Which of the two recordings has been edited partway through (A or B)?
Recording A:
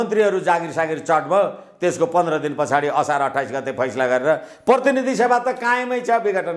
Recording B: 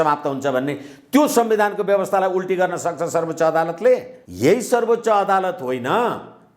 B